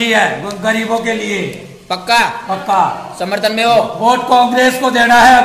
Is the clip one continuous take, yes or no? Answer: yes